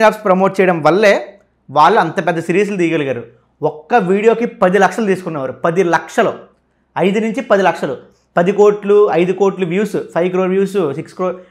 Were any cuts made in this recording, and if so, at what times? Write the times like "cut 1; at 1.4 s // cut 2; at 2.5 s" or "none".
none